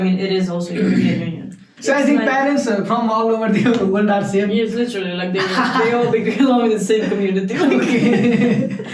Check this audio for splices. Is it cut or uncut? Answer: cut